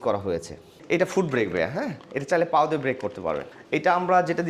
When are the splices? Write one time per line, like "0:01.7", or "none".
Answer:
0:00.8
0:03.5

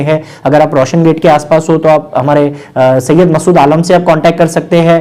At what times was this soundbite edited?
none

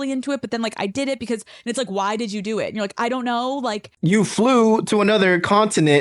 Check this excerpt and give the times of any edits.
none

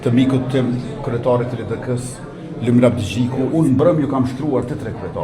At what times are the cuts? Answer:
0:03.5

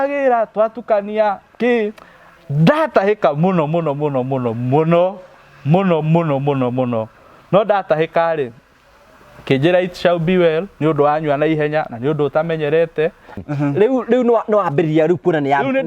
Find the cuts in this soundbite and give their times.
0:13.4

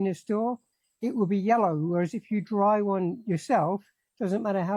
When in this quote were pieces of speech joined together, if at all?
none

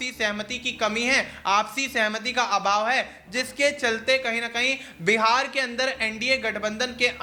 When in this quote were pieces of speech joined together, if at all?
none

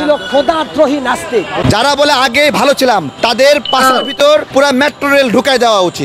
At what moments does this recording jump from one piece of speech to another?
0:01.6
0:03.1
0:04.5

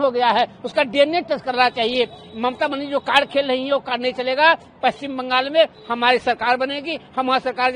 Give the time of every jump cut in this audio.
none

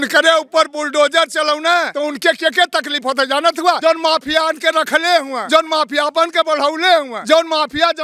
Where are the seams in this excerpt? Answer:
0:01.9
0:03.8
0:05.4
0:07.1

